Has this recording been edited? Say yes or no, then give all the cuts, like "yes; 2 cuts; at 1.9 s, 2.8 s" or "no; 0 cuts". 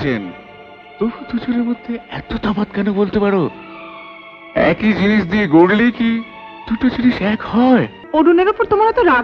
yes; 1 cut; at 8.0 s